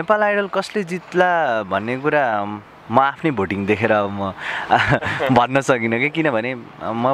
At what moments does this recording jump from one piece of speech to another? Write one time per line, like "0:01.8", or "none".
none